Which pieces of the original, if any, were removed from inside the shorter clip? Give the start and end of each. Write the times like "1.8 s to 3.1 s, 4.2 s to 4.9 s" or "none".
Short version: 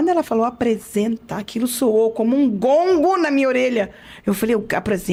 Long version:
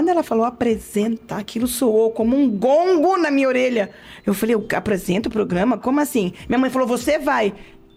none